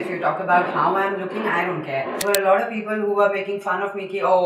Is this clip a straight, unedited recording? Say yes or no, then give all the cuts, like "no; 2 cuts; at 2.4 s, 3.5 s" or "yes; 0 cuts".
no; 1 cut; at 2.2 s